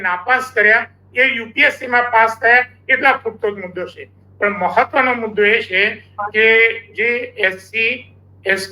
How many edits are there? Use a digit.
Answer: 0